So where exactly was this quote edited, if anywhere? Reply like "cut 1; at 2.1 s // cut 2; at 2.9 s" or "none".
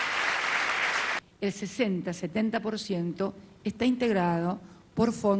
cut 1; at 1.2 s